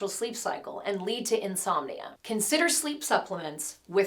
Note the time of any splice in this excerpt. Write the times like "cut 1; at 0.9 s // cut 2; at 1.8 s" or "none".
cut 1; at 2.0 s